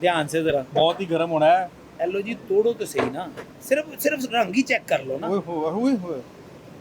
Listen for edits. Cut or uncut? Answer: uncut